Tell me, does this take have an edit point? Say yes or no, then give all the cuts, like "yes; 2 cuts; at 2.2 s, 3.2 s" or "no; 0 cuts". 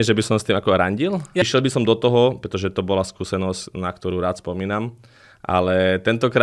yes; 1 cut; at 1.5 s